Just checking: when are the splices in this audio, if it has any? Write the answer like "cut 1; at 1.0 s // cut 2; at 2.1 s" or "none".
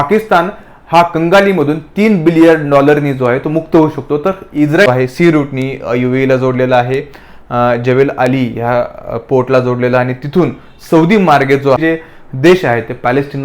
cut 1; at 4.9 s // cut 2; at 11.8 s